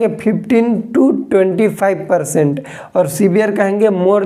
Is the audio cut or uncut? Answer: uncut